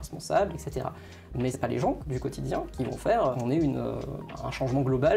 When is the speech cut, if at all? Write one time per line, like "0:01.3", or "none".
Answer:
0:01.5
0:03.3
0:04.2